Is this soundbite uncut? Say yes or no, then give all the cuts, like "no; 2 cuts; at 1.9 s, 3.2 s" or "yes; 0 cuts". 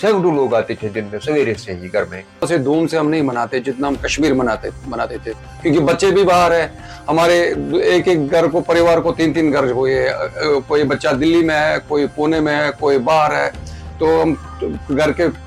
no; 1 cut; at 2.5 s